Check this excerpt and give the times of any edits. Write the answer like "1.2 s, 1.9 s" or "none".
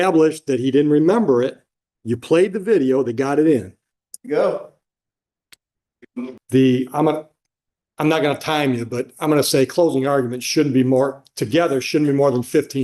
6.4 s